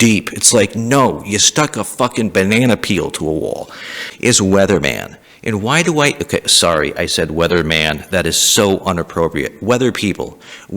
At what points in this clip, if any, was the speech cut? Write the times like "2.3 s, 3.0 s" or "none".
4.1 s